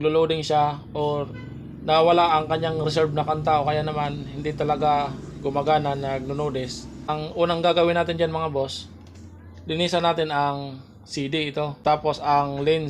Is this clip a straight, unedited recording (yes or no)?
no